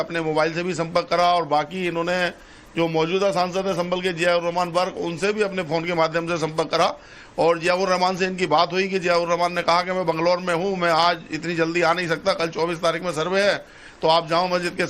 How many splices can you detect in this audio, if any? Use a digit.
1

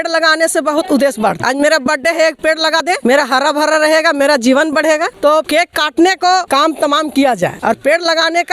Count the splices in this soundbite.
5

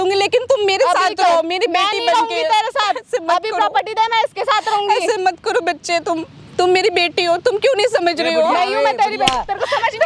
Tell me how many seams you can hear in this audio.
0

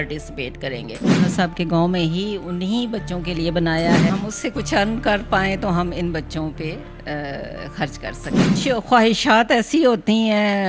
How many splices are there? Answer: 3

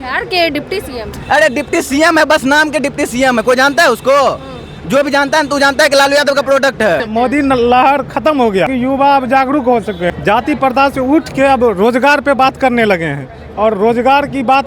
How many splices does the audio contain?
3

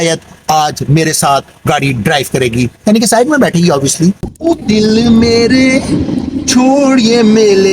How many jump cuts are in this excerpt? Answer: 1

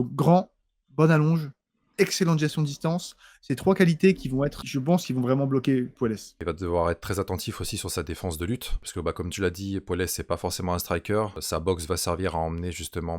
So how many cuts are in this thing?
1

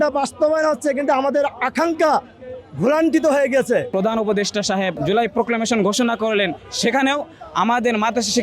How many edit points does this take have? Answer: 2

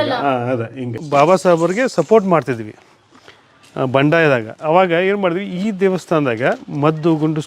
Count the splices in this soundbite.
1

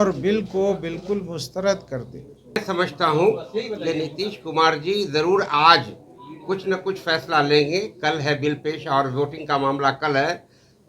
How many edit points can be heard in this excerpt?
1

